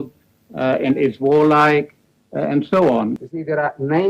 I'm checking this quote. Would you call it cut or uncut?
cut